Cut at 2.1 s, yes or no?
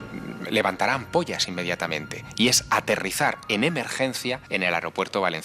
no